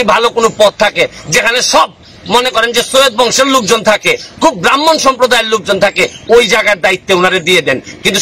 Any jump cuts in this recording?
no; 0 cuts

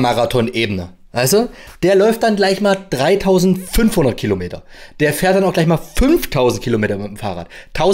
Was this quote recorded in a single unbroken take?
yes; 0 cuts

